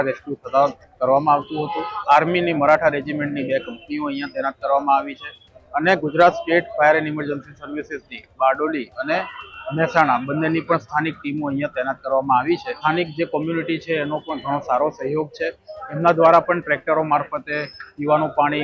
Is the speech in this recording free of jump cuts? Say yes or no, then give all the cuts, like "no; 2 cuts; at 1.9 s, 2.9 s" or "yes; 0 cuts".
no; 2 cuts; at 2.0 s, 12.8 s